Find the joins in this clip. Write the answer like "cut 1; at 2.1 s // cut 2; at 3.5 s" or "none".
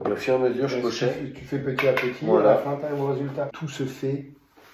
cut 1; at 3.6 s